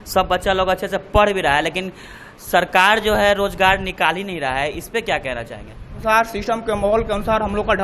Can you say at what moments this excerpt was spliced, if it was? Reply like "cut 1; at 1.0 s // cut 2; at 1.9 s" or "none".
cut 1; at 6.0 s